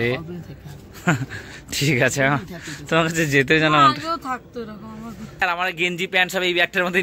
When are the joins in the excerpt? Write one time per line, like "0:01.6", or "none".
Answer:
0:05.4